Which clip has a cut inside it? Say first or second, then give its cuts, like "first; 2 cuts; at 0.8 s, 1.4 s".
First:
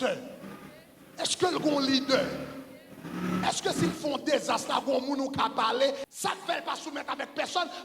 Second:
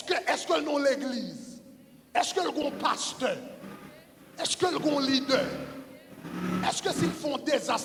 first; 1 cut; at 6.0 s